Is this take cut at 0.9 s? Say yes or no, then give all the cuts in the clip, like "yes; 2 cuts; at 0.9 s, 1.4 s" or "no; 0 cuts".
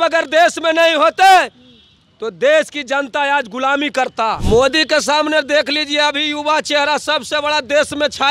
no; 1 cut; at 4.4 s